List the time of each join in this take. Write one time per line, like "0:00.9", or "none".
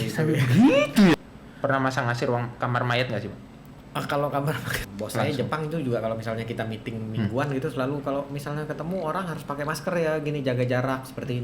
0:01.1
0:04.8